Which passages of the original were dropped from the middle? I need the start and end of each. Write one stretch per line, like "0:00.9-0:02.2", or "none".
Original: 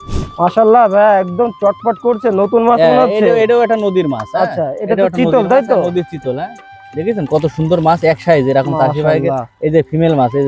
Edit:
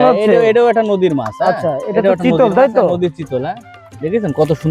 none